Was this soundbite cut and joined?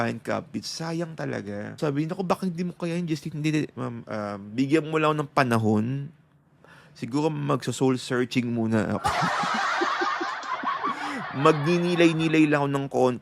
yes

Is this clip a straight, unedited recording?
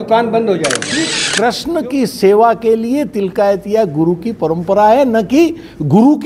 no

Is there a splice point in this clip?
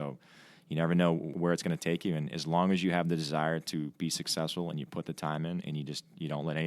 yes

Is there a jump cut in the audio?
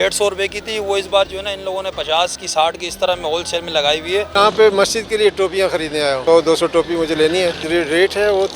yes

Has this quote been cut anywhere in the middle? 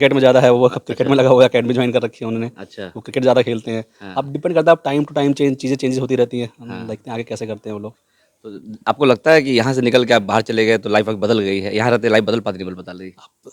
no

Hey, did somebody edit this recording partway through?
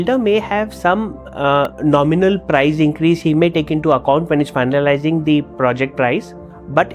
no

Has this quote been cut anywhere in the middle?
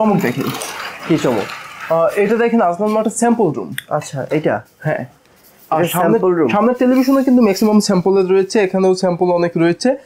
no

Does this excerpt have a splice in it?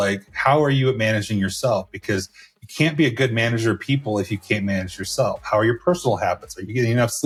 no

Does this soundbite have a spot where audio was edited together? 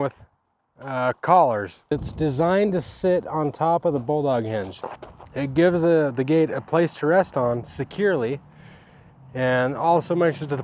yes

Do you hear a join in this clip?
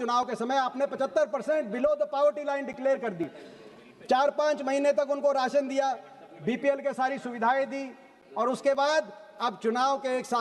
no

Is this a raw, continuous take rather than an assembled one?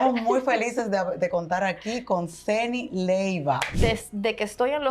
no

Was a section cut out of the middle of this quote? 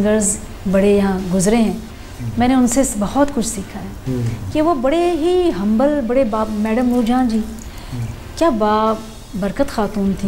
no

